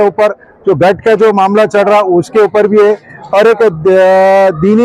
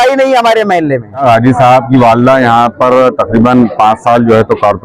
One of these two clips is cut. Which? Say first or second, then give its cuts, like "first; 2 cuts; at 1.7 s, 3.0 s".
second; 1 cut; at 1.2 s